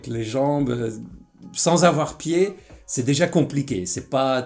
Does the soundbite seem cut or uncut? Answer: uncut